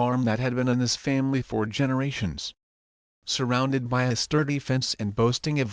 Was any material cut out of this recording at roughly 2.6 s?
no; 1 cut; at 4.5 s

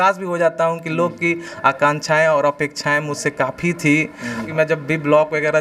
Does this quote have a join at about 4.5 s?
yes; 1 cut; at 4.5 s

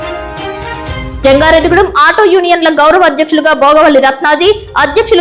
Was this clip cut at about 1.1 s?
yes; 1 cut; at 1.1 s

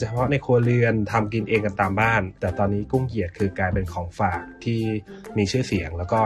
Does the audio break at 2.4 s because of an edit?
yes; 1 cut; at 2.4 s

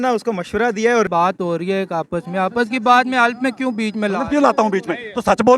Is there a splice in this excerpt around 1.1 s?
yes; 1 cut; at 1.1 s

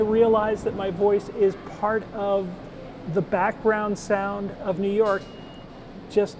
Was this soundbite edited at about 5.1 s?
no; 0 cuts

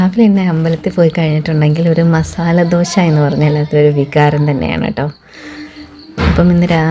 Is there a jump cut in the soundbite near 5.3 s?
no; 0 cuts

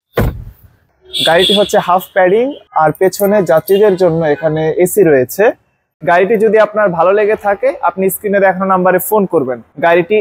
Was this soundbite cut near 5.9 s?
yes; 2 cuts; at 0.9 s, 5.9 s

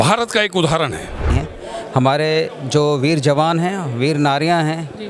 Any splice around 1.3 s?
yes; 1 cut; at 1.3 s

